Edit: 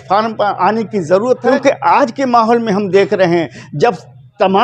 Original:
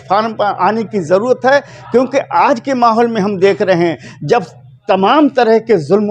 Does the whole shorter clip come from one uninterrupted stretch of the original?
no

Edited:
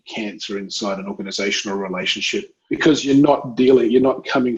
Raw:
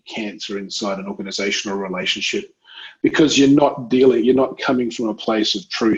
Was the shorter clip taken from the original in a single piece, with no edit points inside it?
no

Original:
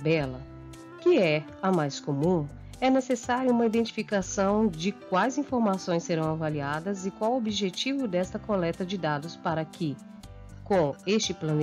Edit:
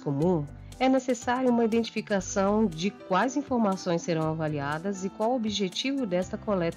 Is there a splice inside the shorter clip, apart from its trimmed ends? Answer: no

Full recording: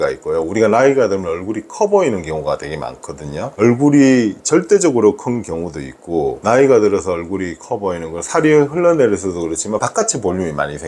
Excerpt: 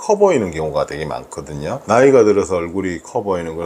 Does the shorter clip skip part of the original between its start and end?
yes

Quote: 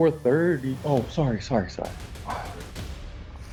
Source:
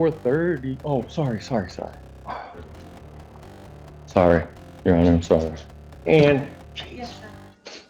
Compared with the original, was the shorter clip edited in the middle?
no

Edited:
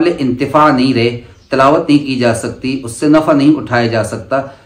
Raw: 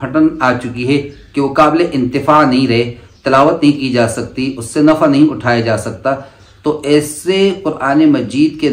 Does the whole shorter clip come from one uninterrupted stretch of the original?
yes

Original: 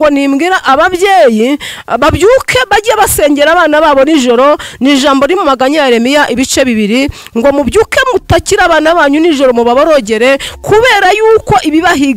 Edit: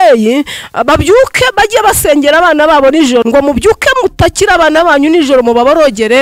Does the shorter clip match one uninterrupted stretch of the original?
no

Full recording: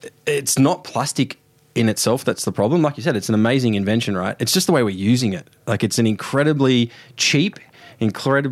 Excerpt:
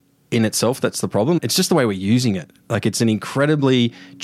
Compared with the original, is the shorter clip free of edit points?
no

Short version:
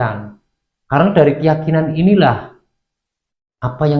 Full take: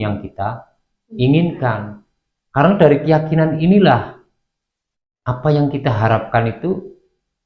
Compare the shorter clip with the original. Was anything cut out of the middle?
no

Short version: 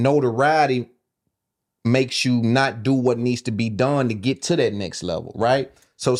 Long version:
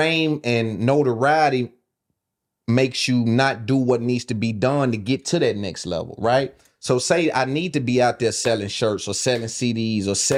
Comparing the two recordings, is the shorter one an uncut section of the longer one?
yes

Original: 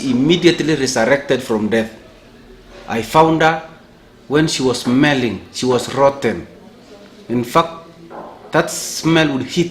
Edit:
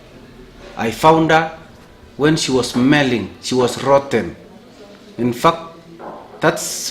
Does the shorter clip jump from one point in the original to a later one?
no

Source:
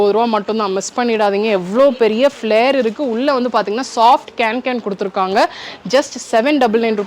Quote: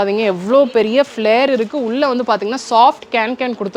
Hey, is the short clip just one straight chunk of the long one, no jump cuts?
yes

